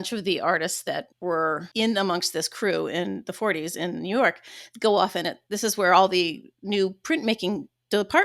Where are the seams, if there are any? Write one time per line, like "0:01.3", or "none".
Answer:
0:01.7